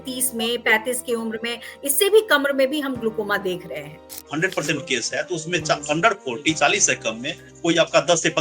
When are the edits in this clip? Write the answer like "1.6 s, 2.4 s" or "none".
4.2 s